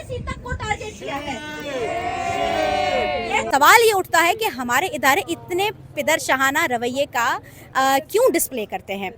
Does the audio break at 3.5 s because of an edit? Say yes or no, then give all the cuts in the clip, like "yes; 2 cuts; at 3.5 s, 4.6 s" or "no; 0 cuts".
yes; 1 cut; at 3.5 s